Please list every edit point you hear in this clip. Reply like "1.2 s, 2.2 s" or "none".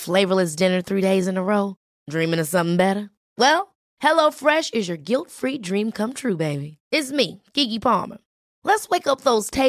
none